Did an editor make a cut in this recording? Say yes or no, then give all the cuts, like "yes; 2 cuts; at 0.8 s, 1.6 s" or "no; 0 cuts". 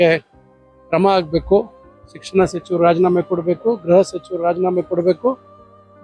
no; 0 cuts